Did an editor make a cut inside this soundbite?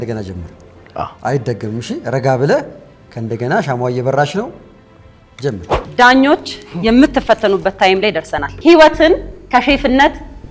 yes; 2 cuts; at 5.9 s, 8.4 s

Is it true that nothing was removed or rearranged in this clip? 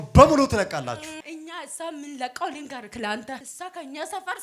no; 2 cuts; at 1.2 s, 3.5 s

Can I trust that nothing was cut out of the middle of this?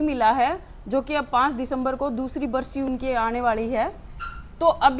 yes; 0 cuts

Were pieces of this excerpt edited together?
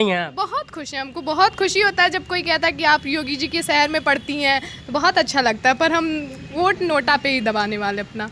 no; 0 cuts

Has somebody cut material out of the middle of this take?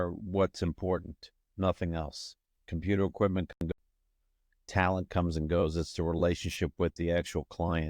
yes; 1 cut; at 3.7 s

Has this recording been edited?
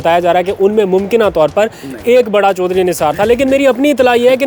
no; 0 cuts

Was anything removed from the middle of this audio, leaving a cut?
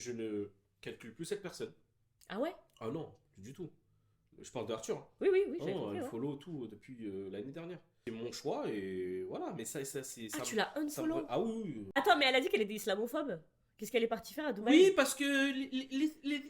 yes; 1 cut; at 11.9 s

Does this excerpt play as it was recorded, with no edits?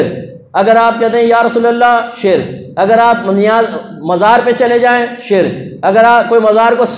yes; 0 cuts

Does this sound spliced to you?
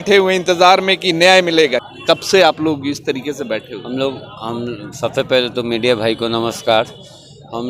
no; 0 cuts

